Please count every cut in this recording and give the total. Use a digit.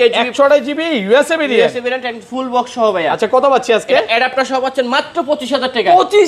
0